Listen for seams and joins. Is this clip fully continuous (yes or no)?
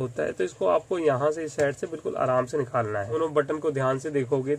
no